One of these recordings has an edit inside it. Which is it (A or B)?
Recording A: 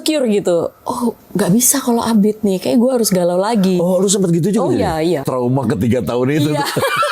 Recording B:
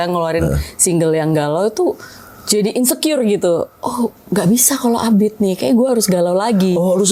A